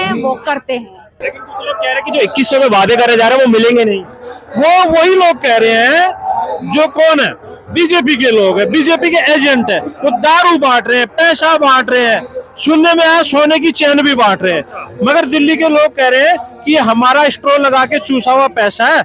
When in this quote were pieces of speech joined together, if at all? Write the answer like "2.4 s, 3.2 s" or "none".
1.2 s

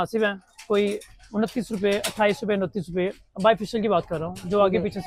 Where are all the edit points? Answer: none

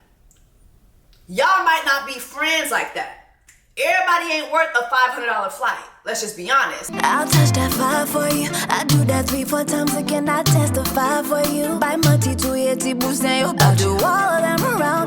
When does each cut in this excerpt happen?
6.9 s

